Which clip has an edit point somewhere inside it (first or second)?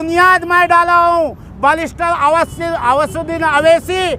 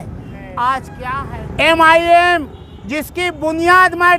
second